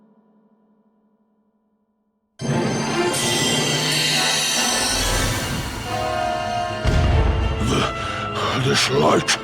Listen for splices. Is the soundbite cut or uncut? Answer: cut